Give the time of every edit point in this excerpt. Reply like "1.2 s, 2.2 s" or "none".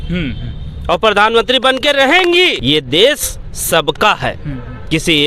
2.6 s